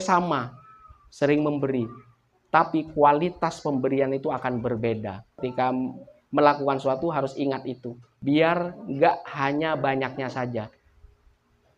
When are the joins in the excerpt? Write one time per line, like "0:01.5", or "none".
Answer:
0:05.3